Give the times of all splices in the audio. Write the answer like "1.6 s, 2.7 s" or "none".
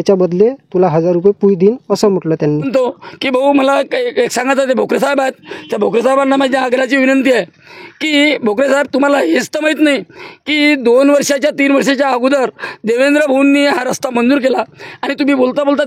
2.7 s